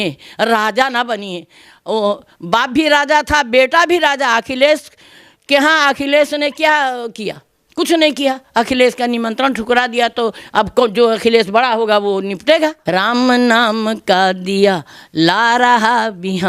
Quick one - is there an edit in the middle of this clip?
yes; 1 cut; at 12.8 s

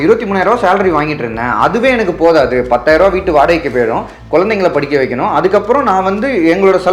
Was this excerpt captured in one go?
yes; 0 cuts

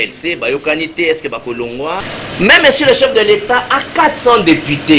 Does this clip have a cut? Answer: yes; 1 cut; at 2.2 s

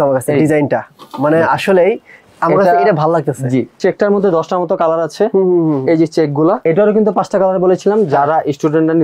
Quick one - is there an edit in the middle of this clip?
yes; 2 cuts; at 3.8 s, 6.6 s

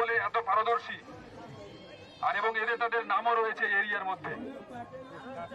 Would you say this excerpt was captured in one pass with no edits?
no; 1 cut; at 1.3 s

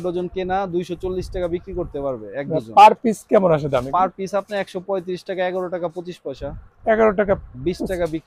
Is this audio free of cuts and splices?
yes; 0 cuts

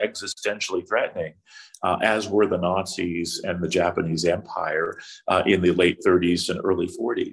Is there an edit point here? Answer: no; 0 cuts

